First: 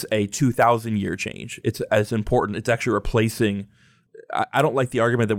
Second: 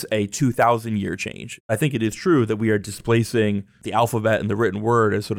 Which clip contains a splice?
second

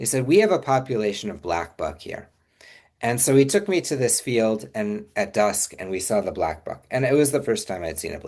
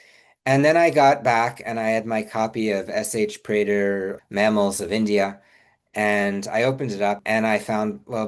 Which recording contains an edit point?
second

